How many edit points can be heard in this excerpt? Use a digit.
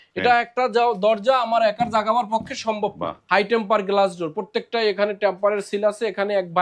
1